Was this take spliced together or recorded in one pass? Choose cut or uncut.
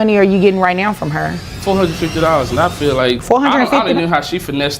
cut